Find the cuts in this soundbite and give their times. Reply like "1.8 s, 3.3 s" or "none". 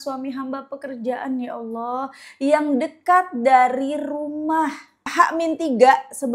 5.1 s